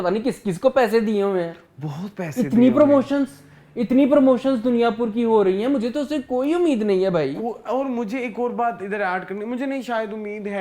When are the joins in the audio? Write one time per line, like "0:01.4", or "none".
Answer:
none